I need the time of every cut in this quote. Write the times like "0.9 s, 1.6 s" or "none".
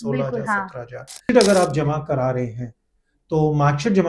1.2 s